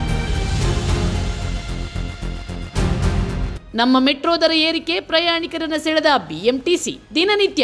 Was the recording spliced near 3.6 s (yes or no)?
yes